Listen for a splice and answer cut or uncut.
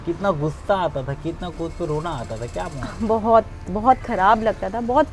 uncut